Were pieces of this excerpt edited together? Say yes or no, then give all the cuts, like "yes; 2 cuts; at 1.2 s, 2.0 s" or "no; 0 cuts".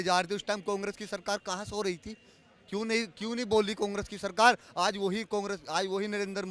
no; 0 cuts